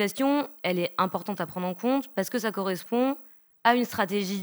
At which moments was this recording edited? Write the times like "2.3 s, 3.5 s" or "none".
none